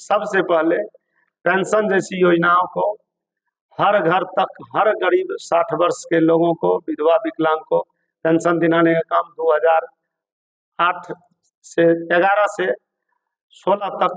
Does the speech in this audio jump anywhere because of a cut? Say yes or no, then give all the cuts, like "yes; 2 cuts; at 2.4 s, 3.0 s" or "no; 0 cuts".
no; 0 cuts